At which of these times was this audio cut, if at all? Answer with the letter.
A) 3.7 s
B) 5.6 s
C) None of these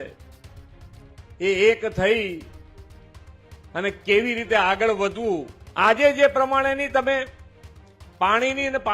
B